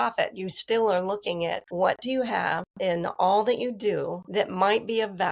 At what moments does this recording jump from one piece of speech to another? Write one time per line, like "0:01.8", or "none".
0:01.6
0:02.7
0:04.2